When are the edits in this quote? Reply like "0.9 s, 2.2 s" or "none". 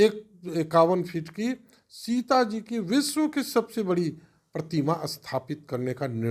none

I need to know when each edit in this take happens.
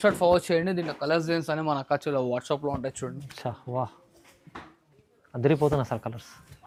none

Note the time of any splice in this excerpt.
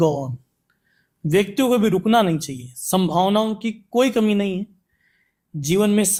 none

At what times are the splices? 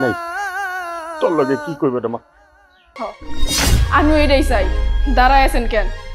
2.8 s

